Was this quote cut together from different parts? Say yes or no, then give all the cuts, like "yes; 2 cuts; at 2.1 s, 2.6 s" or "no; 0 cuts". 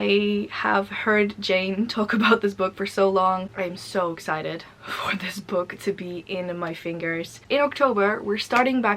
yes; 2 cuts; at 3.5 s, 7.4 s